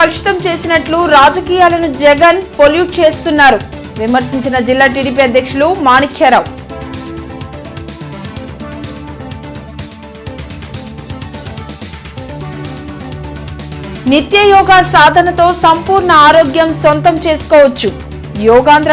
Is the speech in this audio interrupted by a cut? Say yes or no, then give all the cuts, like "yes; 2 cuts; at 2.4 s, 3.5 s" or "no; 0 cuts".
no; 0 cuts